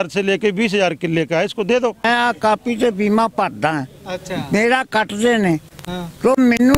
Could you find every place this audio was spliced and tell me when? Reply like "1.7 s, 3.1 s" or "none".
2.0 s